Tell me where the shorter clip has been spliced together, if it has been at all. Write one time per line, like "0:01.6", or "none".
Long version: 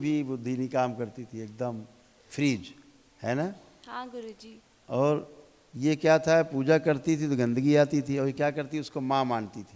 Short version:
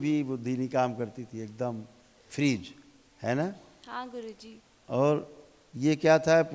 none